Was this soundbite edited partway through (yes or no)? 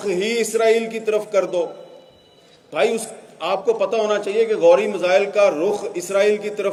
no